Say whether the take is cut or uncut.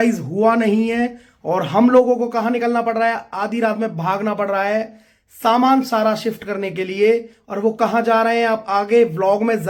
uncut